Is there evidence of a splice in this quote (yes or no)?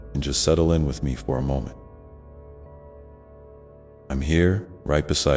yes